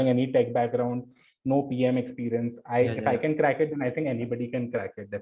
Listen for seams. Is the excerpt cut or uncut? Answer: uncut